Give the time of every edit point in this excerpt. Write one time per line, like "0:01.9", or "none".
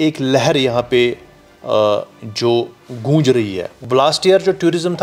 0:03.8

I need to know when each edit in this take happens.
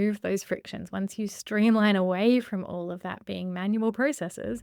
none

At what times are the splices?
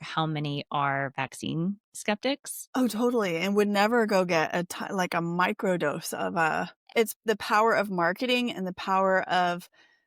0:06.8

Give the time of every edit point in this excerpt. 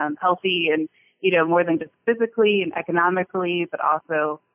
none

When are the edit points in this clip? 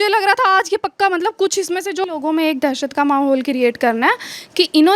0:02.0

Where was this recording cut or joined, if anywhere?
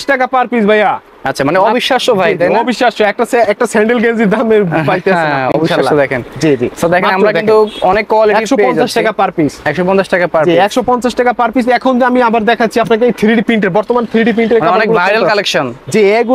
none

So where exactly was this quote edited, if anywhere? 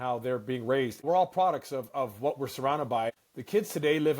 0:01.0
0:03.1

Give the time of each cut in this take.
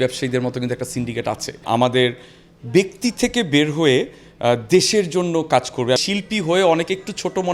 0:01.6
0:06.0

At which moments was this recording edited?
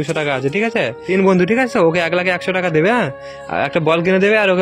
0:01.0

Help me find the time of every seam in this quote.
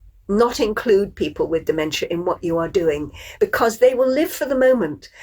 0:03.2

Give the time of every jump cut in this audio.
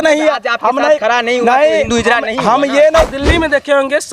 0:03.1

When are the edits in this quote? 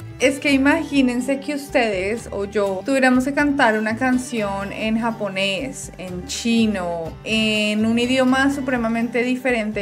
none

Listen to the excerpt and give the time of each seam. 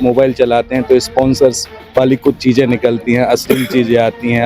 none

